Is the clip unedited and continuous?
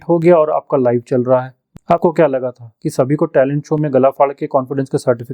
no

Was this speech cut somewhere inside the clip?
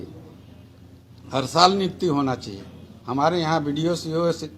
no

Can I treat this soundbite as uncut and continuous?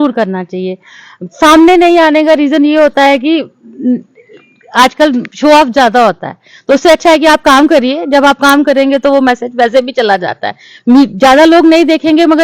yes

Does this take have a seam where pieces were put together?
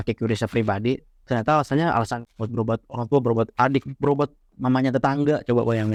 no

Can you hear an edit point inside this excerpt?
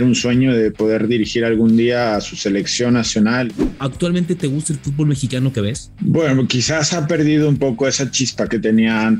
yes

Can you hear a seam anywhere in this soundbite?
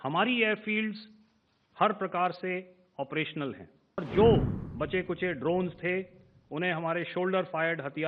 yes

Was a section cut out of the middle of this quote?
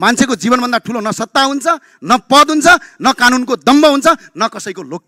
no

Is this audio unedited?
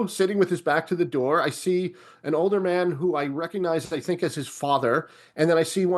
yes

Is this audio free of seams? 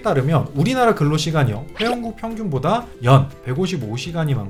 yes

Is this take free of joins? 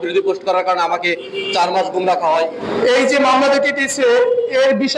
no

